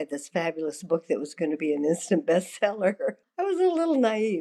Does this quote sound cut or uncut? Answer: cut